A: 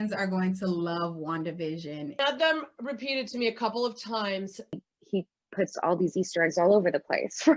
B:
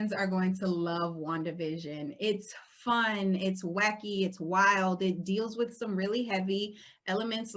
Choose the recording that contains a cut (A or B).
A